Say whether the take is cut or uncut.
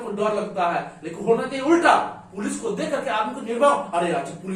uncut